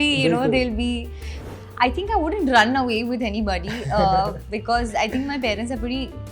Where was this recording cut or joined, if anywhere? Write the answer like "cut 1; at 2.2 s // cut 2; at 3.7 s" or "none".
cut 1; at 1.3 s

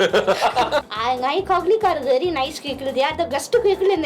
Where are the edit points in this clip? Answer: cut 1; at 0.9 s

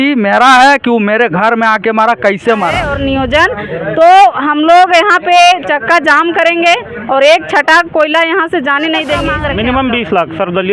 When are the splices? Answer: cut 1; at 2.9 s // cut 2; at 9.3 s

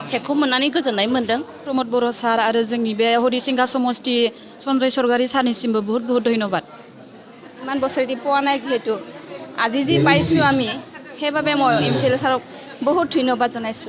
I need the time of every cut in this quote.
cut 1; at 1.6 s // cut 2; at 4.6 s // cut 3; at 7.7 s

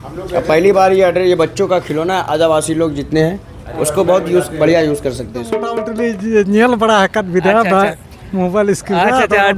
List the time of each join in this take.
cut 1; at 5.7 s

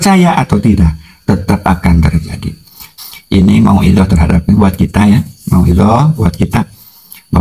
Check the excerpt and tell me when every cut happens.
cut 1; at 2.9 s

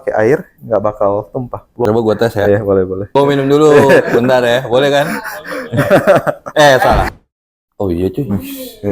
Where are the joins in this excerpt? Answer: cut 1; at 1.8 s // cut 2; at 3.1 s // cut 3; at 7.1 s

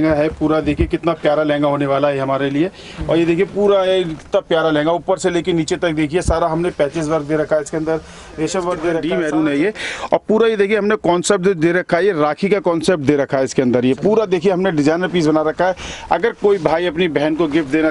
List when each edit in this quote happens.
cut 1; at 9.0 s

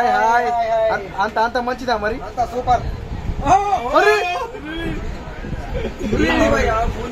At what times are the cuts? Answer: none

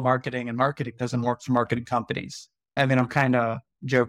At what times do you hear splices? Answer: cut 1; at 2.8 s

